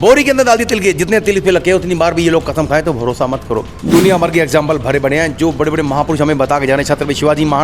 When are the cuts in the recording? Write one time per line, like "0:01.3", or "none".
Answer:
0:03.7